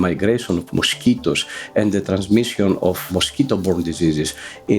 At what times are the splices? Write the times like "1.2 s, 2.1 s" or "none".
3.1 s

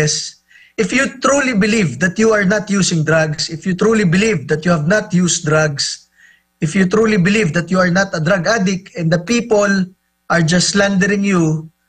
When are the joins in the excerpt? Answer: none

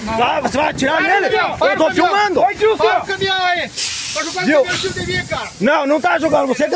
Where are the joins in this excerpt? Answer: none

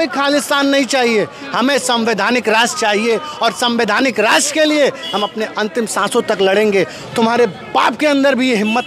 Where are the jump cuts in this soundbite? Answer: 7.0 s

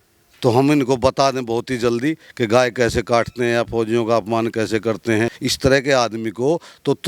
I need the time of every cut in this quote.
5.4 s

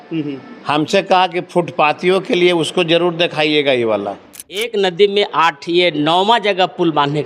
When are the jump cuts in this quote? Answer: 4.6 s

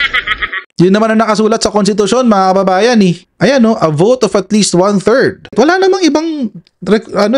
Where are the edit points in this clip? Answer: 5.5 s

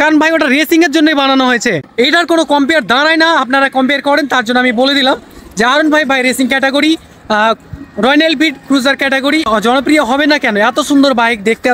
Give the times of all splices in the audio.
1.9 s, 9.5 s

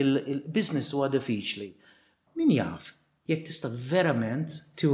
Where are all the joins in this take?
2.2 s

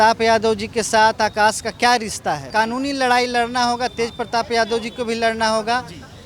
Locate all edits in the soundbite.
2.5 s

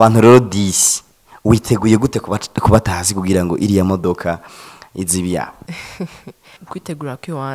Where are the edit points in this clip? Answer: 5.6 s, 6.6 s

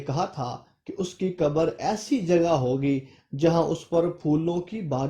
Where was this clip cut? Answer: none

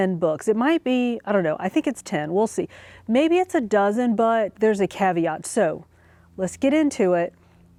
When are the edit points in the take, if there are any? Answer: none

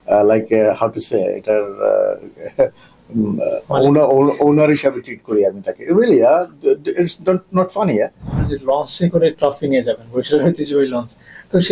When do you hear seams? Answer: 8.5 s

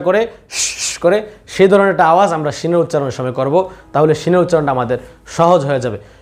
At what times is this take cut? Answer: none

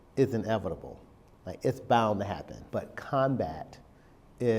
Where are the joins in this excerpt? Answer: 2.5 s

